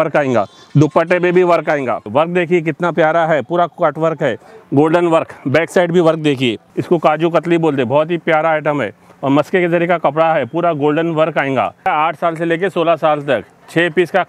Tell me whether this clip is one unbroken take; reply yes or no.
no